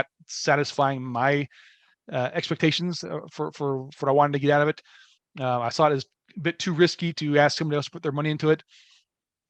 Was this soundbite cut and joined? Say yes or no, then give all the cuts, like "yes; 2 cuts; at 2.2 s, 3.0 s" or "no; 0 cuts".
no; 0 cuts